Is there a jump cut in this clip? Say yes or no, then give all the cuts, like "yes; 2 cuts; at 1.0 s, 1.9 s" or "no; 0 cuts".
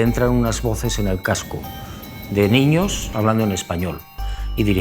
yes; 1 cut; at 3.1 s